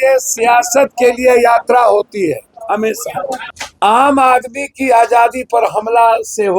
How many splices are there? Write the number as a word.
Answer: one